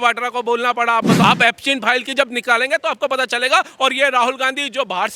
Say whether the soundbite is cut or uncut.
cut